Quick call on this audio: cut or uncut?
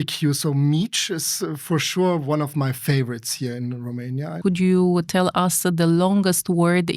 cut